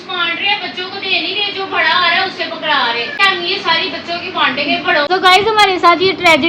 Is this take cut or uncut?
cut